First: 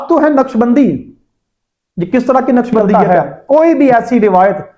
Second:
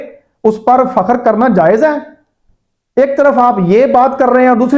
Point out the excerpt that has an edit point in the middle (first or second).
first